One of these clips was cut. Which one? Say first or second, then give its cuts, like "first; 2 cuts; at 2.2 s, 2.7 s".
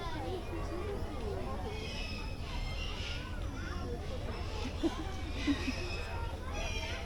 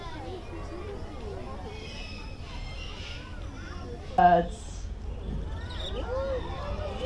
second; 1 cut; at 4.2 s